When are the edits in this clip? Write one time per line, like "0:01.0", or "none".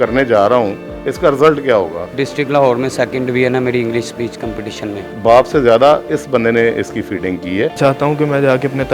0:02.1
0:05.1
0:07.8